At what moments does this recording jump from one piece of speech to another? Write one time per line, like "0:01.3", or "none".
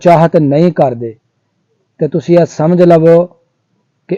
none